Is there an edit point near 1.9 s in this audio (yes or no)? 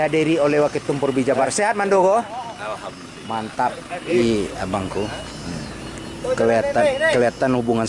no